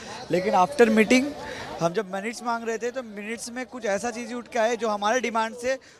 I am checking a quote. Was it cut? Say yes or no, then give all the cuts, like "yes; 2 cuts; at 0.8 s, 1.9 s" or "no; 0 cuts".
no; 0 cuts